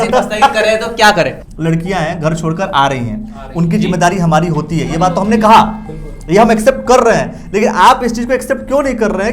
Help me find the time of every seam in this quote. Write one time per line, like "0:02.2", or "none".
0:01.4